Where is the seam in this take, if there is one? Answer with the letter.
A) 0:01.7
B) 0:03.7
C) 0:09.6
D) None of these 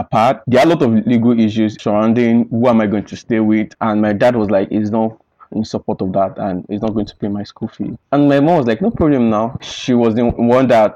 B